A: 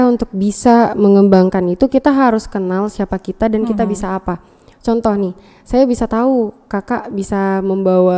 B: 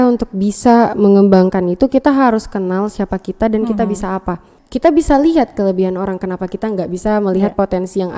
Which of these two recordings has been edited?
B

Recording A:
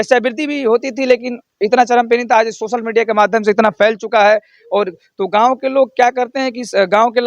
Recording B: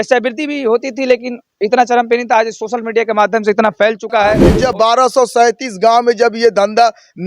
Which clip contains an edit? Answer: B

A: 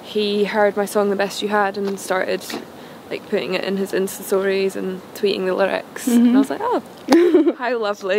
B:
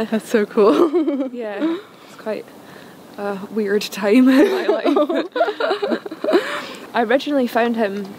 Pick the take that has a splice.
B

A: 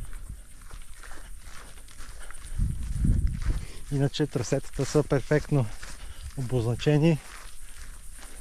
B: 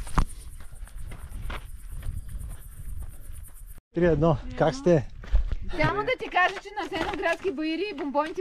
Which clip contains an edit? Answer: B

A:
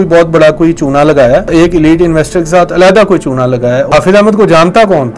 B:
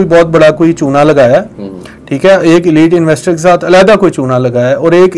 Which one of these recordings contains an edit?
A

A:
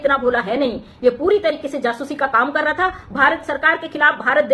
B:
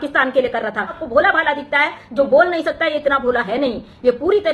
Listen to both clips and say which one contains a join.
B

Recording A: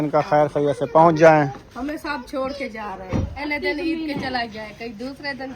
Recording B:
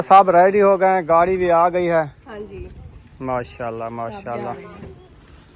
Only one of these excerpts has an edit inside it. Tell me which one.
A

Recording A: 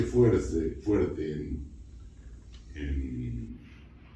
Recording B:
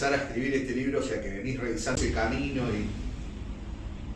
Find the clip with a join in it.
B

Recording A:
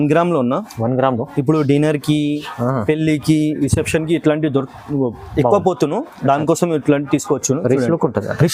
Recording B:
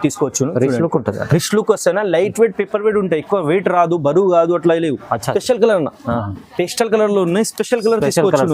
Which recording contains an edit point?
B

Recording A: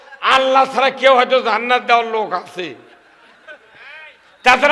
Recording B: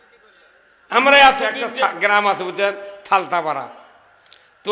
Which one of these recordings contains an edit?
B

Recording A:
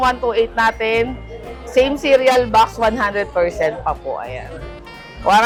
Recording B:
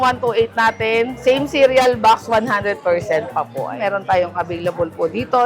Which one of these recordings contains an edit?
B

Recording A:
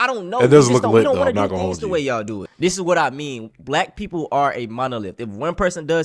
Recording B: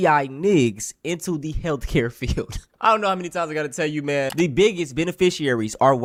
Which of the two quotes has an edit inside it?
A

